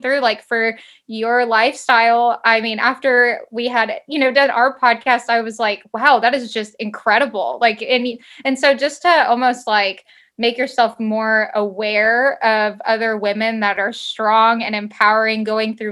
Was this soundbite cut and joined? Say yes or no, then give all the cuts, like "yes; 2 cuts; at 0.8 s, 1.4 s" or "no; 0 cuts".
no; 0 cuts